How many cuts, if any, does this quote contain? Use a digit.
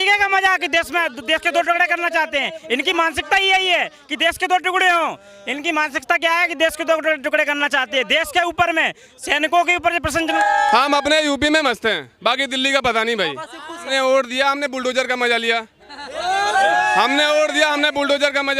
2